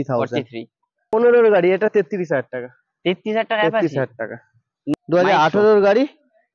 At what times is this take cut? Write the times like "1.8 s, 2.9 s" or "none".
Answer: 1.1 s, 4.9 s